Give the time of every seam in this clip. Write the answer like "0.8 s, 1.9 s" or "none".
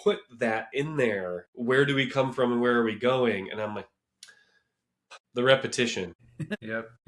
none